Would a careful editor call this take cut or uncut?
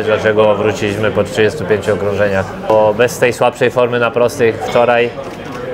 cut